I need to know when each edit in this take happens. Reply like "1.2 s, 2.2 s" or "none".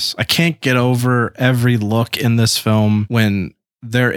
3.1 s